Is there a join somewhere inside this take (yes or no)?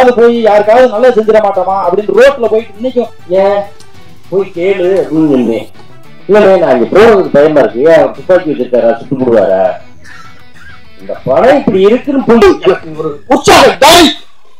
yes